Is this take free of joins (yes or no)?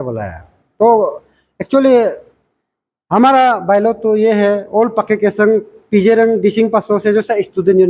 yes